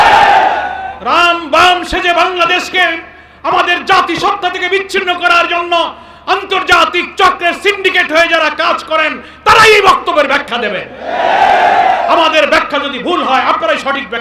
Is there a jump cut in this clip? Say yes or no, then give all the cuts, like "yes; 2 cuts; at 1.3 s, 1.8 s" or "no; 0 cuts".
yes; 1 cut; at 0.9 s